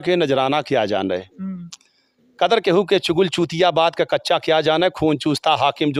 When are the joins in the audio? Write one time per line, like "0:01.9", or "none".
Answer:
none